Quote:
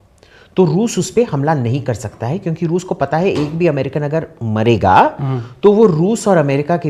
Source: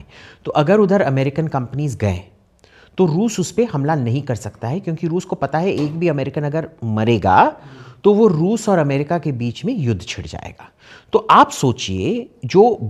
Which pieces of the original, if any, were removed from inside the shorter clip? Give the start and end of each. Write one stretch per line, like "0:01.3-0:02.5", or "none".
none

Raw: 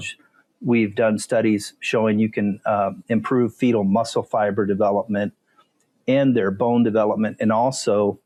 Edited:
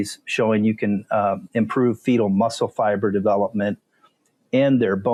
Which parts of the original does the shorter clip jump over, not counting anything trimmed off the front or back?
none

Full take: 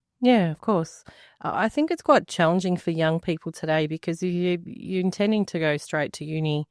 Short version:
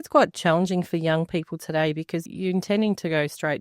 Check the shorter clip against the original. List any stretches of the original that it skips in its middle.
0:04.2-0:04.7

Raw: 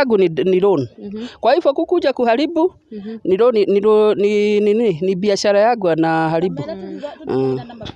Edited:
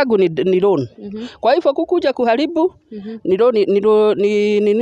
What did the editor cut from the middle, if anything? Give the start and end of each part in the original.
none

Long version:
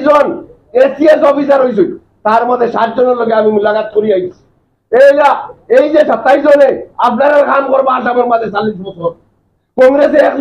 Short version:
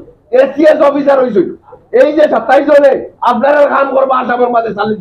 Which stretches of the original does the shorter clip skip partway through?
0:02.1-0:05.5

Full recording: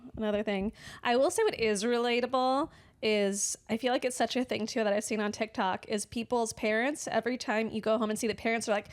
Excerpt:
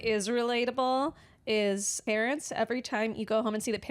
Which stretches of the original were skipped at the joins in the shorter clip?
0:03.5-0:06.5

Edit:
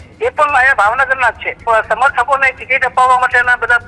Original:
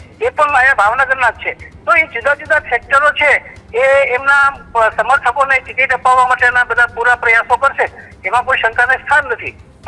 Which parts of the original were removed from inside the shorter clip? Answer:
0:01.5-0:04.6

